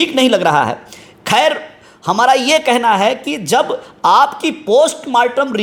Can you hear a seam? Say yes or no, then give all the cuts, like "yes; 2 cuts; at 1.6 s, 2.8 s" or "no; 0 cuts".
no; 0 cuts